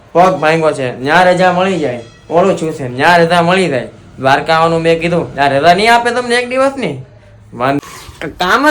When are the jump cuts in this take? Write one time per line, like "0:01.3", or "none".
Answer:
0:07.8